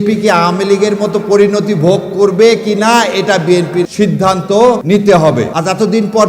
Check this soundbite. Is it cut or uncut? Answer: cut